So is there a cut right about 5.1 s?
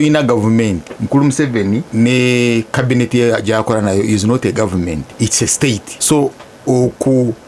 yes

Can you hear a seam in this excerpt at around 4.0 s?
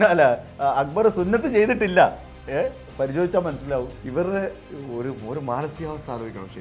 yes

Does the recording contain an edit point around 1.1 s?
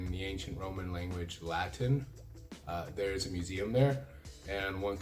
no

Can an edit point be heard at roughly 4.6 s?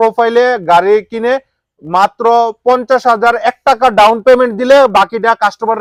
no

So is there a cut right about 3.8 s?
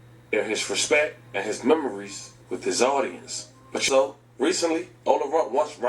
yes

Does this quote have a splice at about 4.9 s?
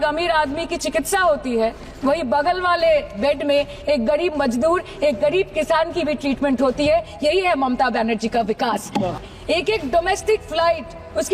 no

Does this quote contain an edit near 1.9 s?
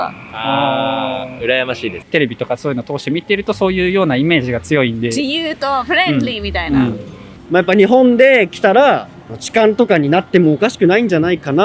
yes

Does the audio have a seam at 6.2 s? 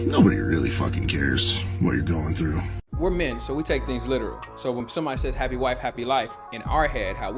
no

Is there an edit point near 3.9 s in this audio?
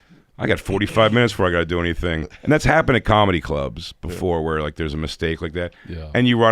no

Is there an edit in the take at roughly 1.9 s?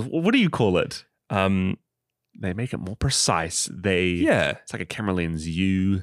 no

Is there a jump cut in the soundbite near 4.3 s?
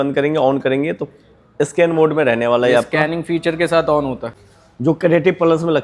yes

